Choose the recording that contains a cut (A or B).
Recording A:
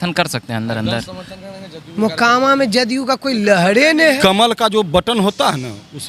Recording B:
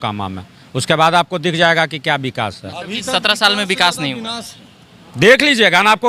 A